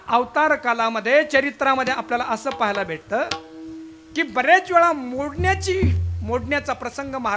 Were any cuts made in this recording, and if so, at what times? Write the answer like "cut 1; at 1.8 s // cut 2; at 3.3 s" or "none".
none